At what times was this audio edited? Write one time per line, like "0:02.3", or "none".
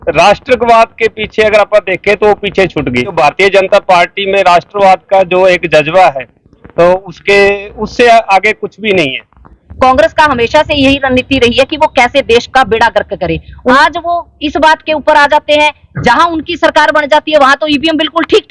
0:03.1
0:09.6
0:13.7